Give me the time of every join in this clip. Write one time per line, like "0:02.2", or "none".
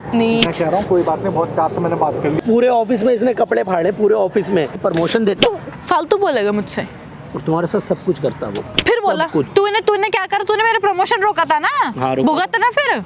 0:02.4
0:04.8
0:09.5